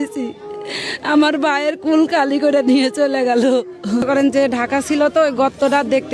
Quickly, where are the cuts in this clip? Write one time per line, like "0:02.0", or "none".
0:04.0